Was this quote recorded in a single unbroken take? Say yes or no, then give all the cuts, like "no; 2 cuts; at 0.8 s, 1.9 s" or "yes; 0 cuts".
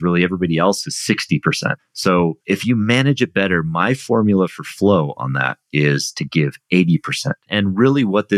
no; 3 cuts; at 1.9 s, 2.4 s, 7.5 s